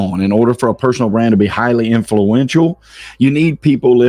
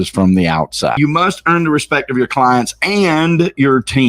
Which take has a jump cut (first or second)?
second